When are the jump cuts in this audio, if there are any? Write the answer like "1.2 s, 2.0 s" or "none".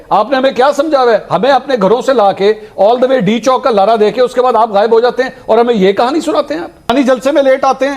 6.9 s